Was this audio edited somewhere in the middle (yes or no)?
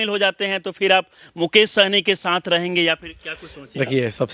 no